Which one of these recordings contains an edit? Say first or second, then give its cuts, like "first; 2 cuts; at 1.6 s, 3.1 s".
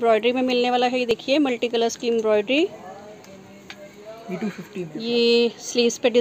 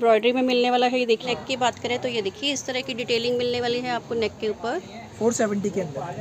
second; 1 cut; at 1.2 s